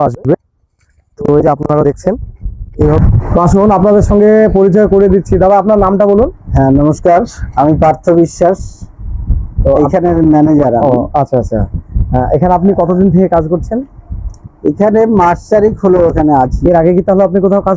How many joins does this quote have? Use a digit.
1